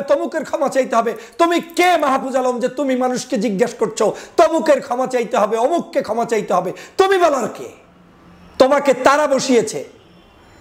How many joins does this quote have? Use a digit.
0